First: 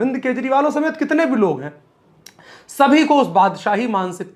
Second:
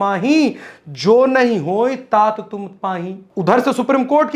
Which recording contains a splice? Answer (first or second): second